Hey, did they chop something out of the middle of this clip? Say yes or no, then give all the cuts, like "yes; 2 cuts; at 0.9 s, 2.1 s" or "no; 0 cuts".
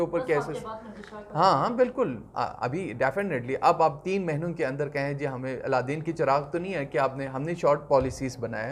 no; 0 cuts